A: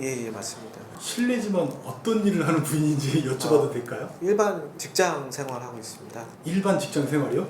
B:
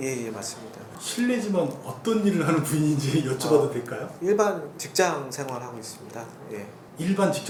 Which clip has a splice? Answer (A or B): A